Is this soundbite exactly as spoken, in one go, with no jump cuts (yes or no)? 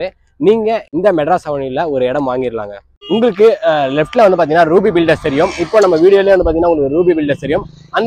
no